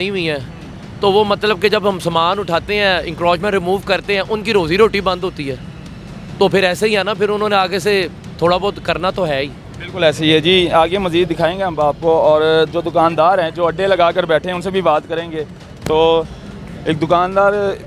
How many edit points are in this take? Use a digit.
0